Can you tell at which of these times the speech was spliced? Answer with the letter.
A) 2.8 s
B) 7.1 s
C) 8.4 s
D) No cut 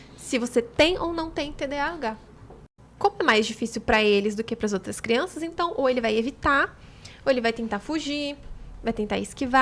A